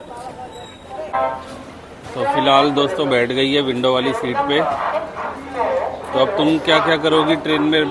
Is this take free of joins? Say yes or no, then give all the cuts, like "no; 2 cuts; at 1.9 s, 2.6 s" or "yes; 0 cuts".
no; 1 cut; at 1.1 s